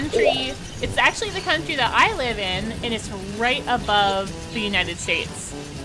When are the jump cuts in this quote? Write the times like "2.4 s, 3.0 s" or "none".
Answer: none